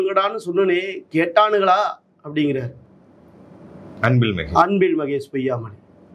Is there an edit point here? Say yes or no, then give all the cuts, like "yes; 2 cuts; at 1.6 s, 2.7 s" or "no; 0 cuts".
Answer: no; 0 cuts